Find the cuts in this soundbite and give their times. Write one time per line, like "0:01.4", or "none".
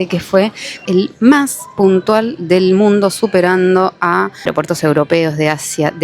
0:00.8
0:04.4